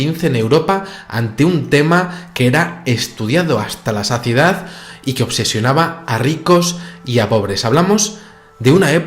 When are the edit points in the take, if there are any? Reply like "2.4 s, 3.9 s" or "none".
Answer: 5.9 s